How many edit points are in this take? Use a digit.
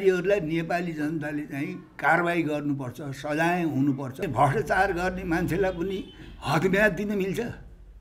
1